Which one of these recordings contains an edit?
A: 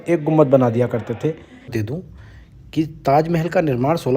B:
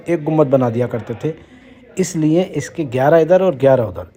A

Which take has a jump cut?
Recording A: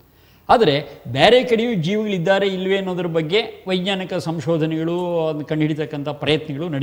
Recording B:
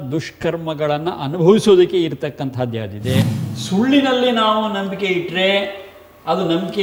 B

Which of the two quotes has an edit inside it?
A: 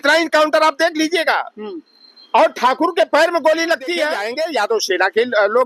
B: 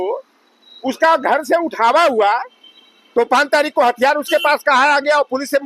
A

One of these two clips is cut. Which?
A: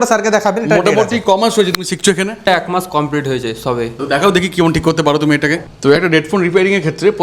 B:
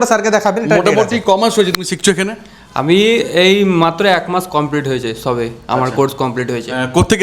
A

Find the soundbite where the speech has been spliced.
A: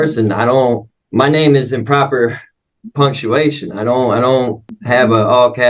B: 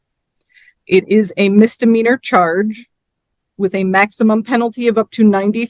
A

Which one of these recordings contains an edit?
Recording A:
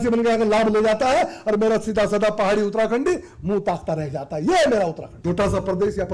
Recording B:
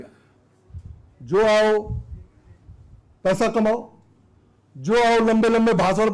A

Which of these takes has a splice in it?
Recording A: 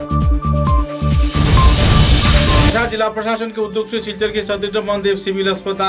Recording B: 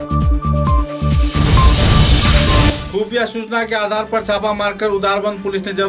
B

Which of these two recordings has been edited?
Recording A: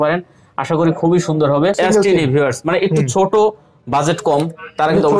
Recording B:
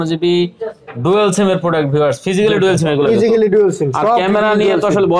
A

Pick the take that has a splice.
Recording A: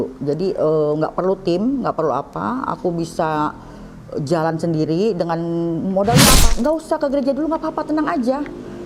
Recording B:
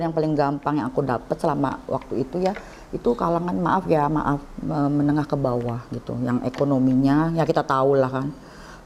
A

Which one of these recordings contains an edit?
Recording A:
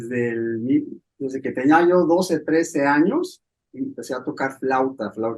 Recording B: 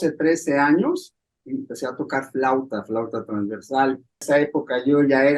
B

